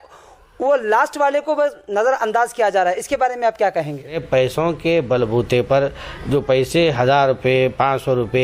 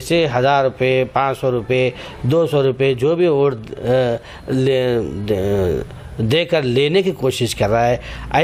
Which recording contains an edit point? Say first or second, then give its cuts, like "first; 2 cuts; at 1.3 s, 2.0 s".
first; 1 cut; at 4.2 s